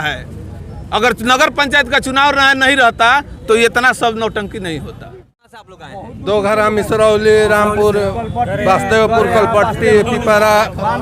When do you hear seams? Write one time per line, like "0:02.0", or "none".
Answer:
0:05.6